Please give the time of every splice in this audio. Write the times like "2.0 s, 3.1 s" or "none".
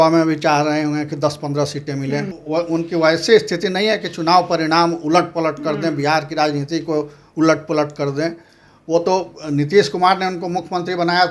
2.3 s

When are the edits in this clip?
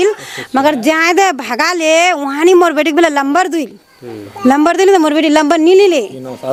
none

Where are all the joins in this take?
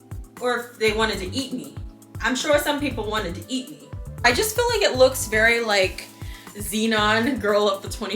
4.2 s

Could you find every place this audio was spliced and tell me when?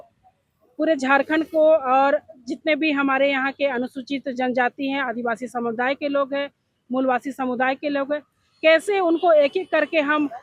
none

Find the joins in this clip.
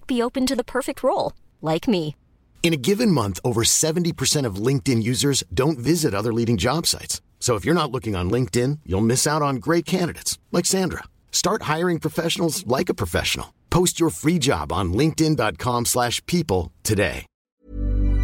17.3 s

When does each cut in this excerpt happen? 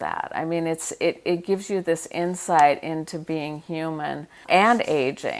4.5 s

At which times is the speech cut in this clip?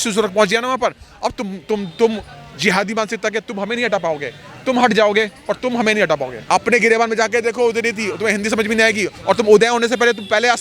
6.4 s

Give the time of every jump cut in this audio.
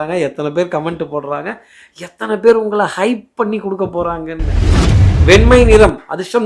4.8 s

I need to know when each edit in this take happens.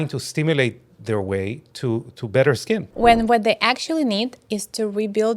2.9 s

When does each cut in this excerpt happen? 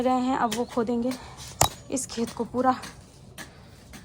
none

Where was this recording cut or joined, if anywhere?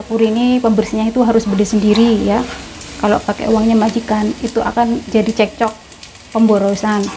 none

